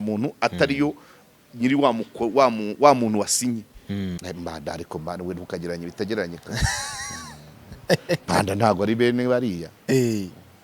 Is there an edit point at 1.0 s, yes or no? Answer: no